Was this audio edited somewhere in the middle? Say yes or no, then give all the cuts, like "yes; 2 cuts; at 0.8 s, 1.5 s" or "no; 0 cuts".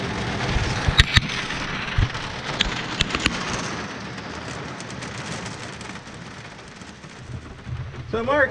yes; 1 cut; at 7.1 s